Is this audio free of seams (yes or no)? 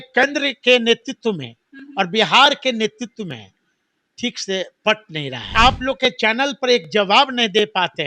no